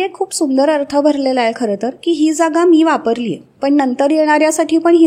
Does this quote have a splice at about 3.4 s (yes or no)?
yes